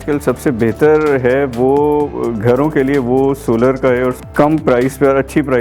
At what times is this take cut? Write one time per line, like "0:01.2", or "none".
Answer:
0:04.2